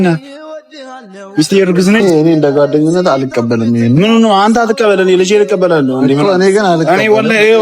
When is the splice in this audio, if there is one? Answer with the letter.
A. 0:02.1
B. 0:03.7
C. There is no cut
A